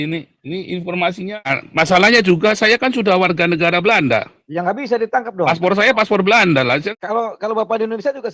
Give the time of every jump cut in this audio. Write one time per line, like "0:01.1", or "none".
0:01.6
0:06.9

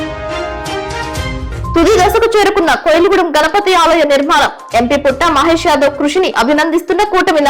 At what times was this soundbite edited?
0:01.7

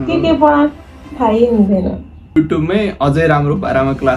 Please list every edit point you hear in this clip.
0:02.3

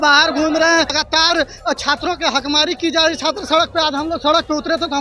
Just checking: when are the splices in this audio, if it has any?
0:01.0

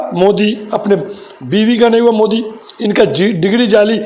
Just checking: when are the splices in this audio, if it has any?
none

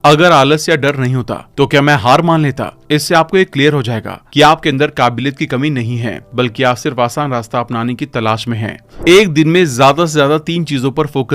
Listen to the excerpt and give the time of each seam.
0:08.9

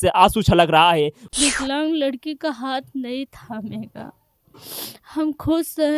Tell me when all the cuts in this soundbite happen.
0:01.2

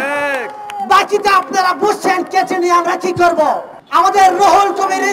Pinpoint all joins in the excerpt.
0:03.7

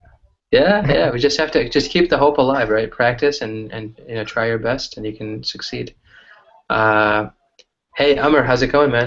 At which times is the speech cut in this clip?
0:03.2

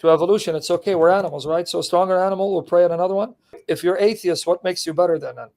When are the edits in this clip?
0:03.7

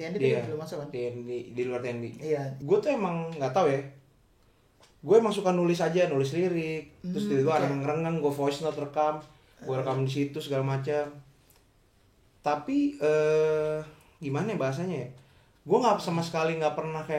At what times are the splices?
0:02.5

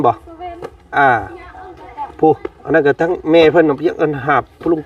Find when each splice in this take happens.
none

